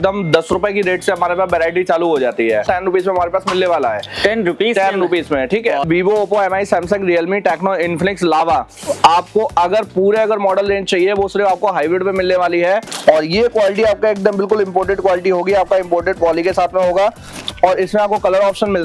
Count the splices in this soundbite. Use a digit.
4